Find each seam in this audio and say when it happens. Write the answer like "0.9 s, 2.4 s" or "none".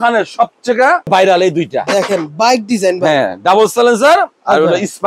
1.1 s